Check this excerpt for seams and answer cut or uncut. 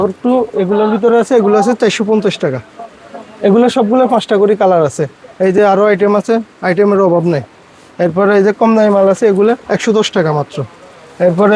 uncut